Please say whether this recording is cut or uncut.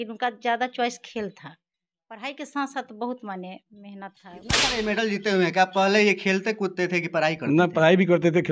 cut